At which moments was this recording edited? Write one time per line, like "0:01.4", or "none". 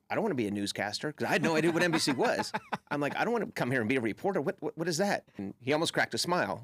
0:05.4